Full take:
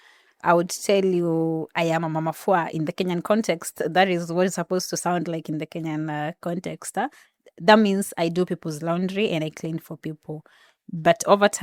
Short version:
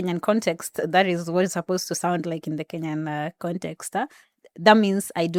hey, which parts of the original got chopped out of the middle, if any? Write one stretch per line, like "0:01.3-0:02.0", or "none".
none

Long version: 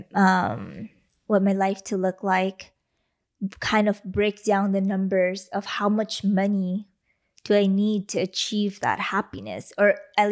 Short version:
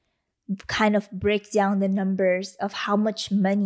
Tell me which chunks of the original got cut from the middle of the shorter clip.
none

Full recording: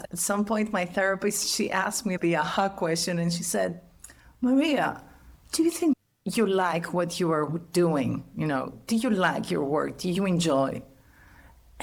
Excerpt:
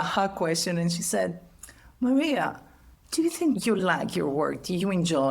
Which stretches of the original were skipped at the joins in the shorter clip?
0:06.2-0:09.2

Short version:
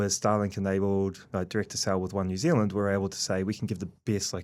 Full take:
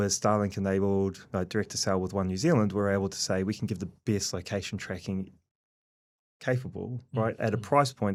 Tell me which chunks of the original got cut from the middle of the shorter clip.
none

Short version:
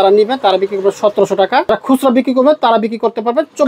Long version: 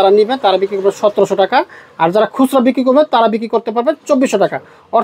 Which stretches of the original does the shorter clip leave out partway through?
0:01.7-0:02.2

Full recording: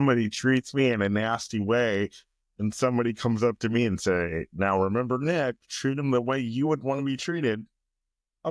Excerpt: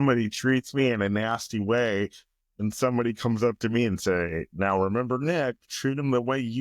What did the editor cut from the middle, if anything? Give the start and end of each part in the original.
none

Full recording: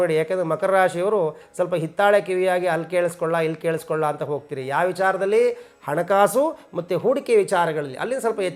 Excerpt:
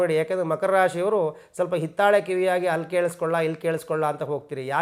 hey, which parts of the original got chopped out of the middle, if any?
none

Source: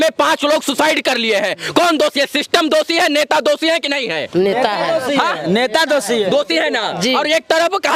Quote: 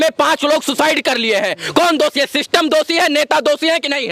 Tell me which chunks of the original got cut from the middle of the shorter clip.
none

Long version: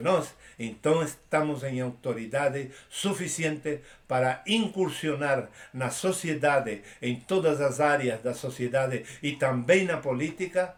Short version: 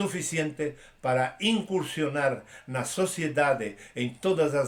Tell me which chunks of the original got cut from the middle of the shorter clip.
none

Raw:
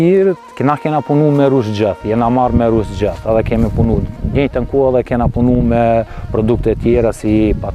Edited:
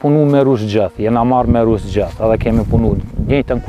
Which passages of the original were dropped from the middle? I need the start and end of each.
none

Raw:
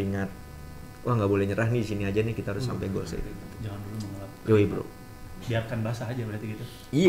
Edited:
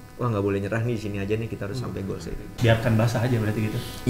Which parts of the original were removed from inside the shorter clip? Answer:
0:03.3-0:05.3

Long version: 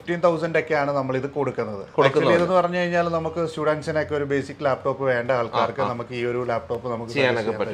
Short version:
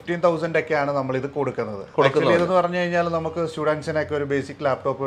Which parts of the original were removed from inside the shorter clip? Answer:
none

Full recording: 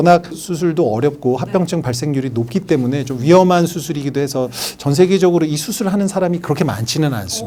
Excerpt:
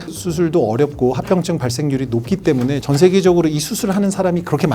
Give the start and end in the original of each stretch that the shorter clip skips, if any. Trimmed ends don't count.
0:03.0-0:04.8

